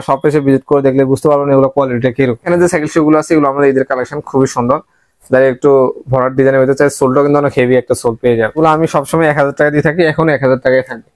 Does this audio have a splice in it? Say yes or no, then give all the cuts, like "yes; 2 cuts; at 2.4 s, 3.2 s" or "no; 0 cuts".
yes; 2 cuts; at 2.4 s, 8.6 s